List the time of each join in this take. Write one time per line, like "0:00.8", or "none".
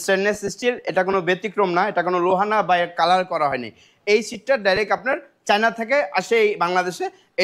none